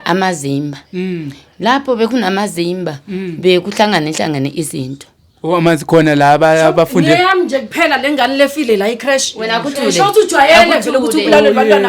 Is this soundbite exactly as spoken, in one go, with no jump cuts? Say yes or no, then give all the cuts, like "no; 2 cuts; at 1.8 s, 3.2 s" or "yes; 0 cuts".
yes; 0 cuts